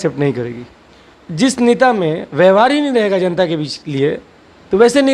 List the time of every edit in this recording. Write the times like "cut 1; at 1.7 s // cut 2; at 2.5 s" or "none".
cut 1; at 1.0 s